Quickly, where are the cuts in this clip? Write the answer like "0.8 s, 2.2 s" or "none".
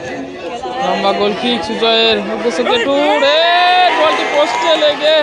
none